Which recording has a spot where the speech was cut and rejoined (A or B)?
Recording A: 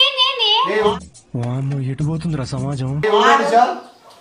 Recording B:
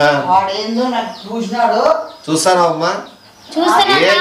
A